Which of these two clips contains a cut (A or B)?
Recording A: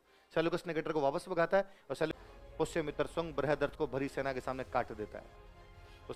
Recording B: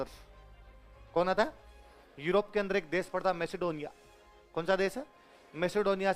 A